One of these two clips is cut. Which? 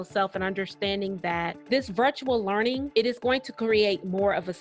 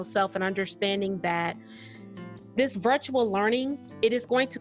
first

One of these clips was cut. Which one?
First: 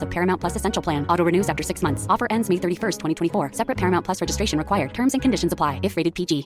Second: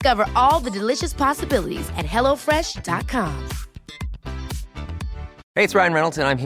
second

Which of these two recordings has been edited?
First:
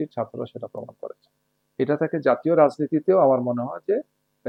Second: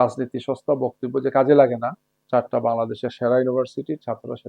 second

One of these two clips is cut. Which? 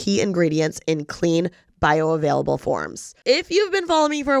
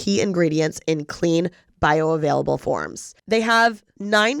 second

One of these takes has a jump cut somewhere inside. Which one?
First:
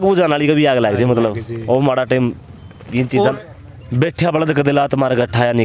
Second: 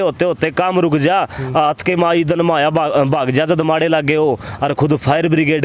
first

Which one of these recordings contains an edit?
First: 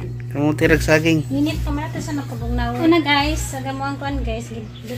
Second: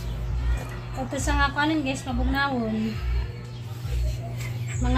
first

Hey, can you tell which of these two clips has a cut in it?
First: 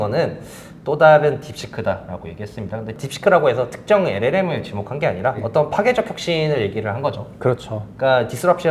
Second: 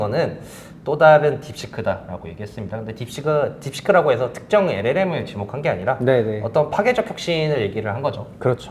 first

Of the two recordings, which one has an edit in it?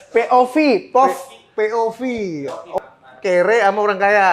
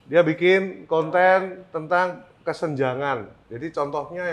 first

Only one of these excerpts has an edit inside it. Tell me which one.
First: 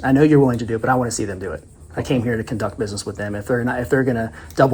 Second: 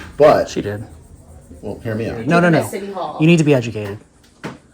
second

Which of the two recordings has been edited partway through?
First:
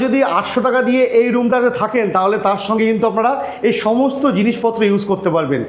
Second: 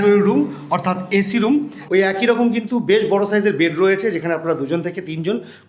second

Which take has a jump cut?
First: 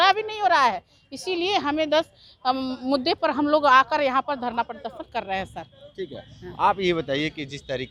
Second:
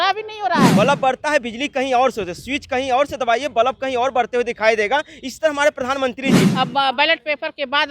second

